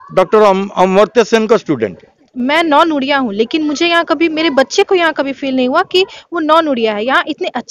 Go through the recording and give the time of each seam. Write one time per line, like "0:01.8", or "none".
0:02.3